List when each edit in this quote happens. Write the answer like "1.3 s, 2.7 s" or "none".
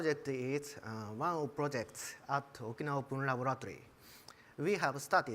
none